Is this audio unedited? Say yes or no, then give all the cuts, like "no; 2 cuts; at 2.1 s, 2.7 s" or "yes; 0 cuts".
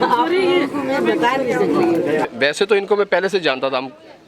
no; 1 cut; at 2.3 s